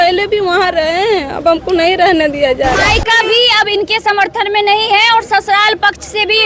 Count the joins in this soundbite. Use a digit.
1